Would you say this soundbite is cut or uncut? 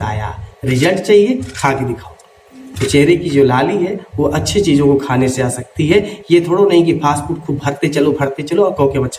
uncut